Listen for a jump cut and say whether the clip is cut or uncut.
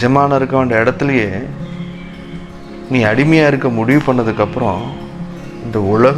uncut